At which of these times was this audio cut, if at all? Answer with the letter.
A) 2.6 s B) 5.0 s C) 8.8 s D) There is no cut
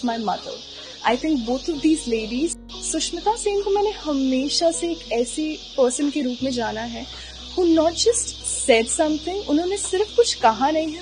A